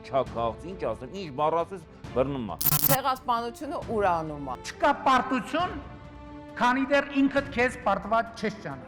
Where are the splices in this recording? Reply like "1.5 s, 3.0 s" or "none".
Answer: none